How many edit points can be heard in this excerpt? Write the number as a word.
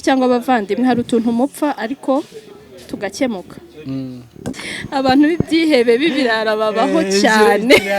one